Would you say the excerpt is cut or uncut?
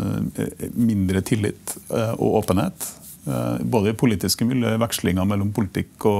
uncut